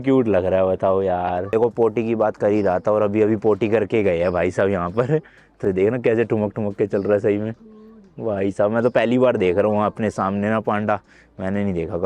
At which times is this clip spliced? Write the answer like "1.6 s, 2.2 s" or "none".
1.5 s